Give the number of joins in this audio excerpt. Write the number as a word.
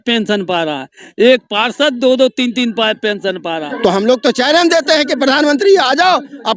one